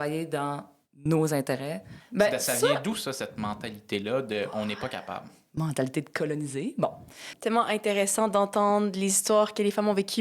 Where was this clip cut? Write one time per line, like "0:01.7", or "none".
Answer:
0:02.0
0:07.3